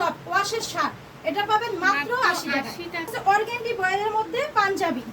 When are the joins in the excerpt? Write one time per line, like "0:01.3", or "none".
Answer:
0:03.2